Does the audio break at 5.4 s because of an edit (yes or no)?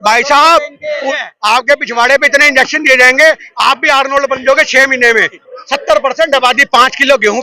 yes